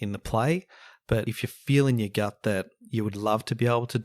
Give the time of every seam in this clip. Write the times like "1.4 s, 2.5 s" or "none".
1.3 s